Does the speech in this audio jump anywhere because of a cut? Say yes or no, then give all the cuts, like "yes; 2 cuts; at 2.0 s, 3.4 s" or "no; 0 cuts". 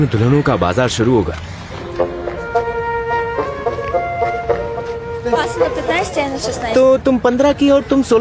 no; 0 cuts